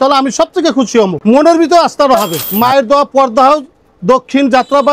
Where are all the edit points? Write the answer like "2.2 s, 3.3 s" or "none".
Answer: 1.2 s, 2.4 s